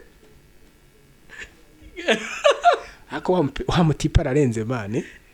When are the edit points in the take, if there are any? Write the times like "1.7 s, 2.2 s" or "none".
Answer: none